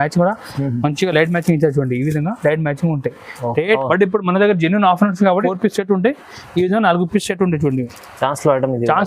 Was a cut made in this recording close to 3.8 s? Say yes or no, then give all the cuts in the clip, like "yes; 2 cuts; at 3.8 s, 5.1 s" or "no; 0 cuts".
yes; 2 cuts; at 3.8 s, 5.5 s